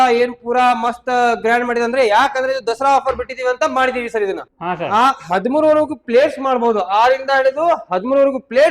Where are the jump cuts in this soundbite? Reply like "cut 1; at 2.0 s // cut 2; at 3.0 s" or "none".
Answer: cut 1; at 4.5 s